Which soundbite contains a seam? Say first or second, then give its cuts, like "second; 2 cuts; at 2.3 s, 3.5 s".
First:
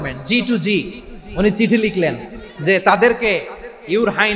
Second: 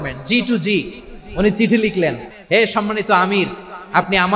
second; 1 cut; at 2.3 s